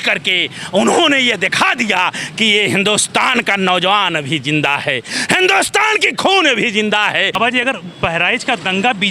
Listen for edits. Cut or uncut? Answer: cut